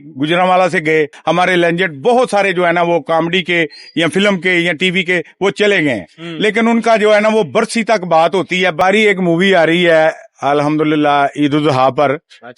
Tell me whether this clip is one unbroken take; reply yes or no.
no